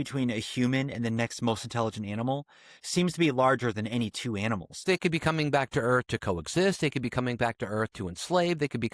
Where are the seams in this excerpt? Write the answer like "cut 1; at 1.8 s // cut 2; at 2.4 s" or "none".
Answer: cut 1; at 4.8 s